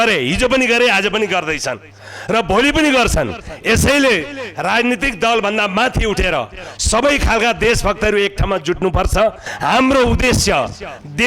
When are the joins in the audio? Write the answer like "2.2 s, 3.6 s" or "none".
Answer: 9.5 s